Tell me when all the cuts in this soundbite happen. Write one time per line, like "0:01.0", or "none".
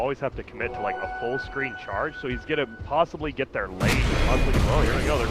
0:01.2